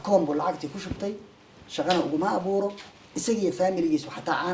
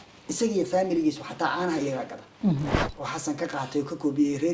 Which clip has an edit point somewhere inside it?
second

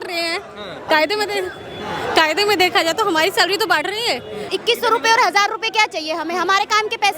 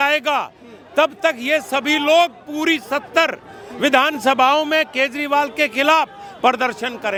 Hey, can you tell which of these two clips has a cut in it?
first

